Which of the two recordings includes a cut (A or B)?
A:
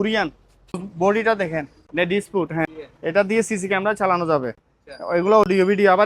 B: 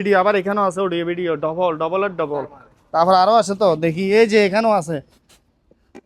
A